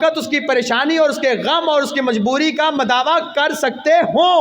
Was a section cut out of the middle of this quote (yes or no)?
no